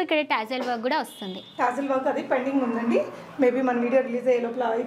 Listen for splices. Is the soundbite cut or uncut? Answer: uncut